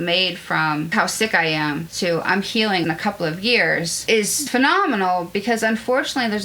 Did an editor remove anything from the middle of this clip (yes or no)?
yes